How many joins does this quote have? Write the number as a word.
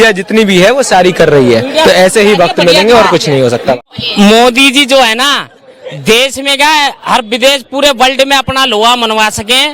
one